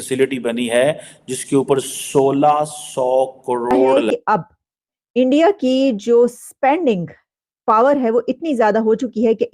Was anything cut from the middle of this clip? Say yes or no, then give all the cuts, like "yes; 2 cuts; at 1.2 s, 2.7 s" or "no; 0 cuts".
yes; 1 cut; at 3.9 s